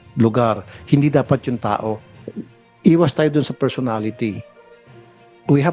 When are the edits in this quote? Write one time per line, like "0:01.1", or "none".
none